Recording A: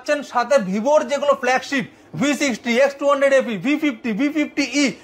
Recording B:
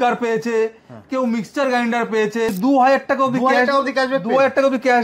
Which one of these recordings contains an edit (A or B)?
B